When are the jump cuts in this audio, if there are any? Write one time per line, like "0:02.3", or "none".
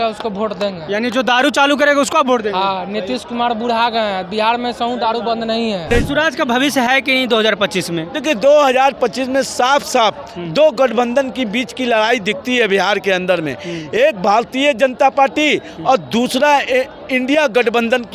0:05.9